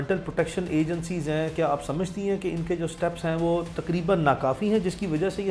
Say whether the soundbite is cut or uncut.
uncut